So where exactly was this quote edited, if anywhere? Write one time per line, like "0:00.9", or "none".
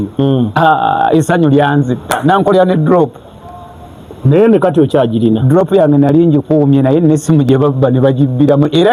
none